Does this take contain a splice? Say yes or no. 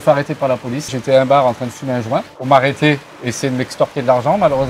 yes